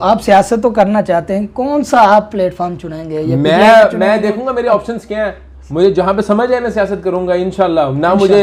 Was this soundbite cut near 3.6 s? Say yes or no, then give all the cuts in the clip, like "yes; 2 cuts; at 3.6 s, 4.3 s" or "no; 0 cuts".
no; 0 cuts